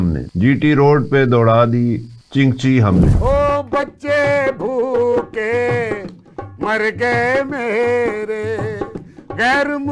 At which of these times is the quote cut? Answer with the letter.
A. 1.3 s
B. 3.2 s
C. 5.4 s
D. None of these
B